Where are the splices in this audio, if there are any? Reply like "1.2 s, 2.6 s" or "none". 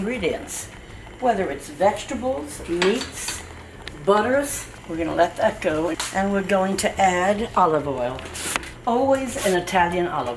none